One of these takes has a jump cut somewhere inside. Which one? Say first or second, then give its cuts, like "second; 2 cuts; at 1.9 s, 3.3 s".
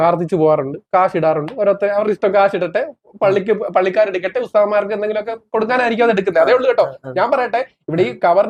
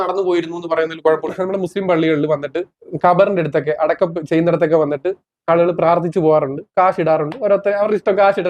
second; 2 cuts; at 1.3 s, 2.8 s